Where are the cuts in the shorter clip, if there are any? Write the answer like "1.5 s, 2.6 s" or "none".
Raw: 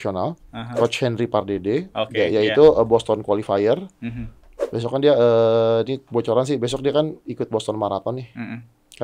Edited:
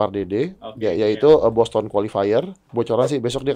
2.6 s